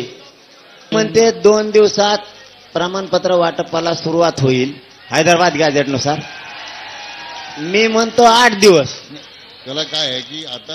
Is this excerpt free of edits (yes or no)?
no